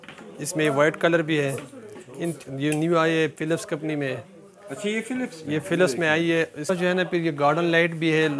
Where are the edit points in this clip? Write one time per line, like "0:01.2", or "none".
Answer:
0:02.4
0:06.7